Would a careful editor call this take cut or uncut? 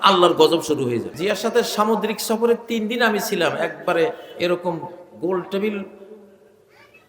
cut